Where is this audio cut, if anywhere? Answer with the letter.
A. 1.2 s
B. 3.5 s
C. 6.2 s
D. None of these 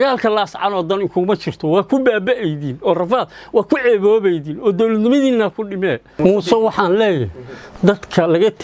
C